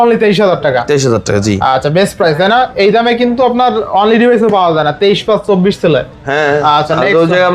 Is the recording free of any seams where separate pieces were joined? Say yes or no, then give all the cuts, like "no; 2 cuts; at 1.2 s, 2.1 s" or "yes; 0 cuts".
yes; 0 cuts